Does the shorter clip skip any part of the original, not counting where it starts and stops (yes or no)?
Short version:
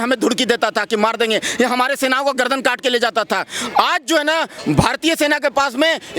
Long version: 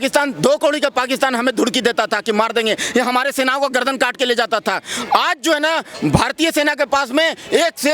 no